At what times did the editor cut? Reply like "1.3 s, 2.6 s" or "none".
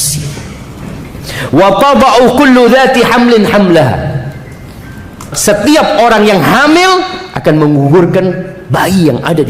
5.3 s